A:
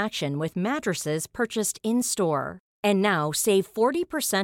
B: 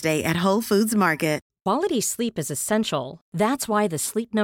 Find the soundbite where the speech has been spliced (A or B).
B